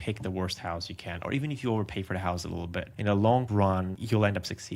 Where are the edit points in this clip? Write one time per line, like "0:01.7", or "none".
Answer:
0:03.6